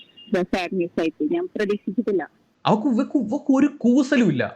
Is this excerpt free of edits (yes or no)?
no